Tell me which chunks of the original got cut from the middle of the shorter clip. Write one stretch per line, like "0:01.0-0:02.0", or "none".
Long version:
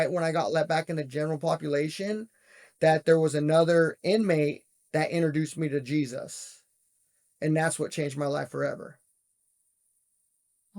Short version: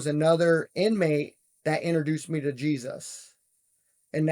none